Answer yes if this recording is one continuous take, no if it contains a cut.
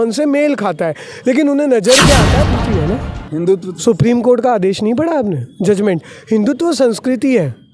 no